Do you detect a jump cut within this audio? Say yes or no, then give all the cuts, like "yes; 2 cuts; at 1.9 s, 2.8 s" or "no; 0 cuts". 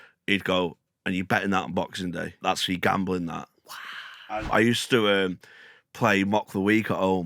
yes; 2 cuts; at 2.4 s, 4.3 s